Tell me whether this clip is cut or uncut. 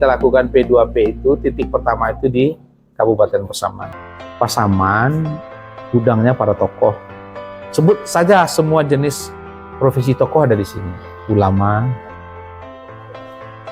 cut